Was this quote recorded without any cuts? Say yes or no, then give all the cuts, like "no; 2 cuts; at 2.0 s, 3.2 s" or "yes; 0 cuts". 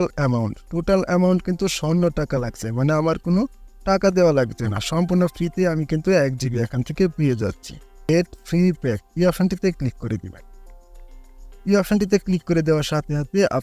no; 1 cut; at 8.0 s